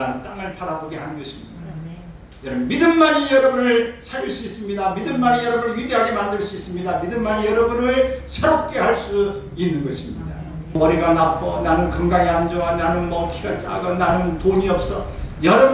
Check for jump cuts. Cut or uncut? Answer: cut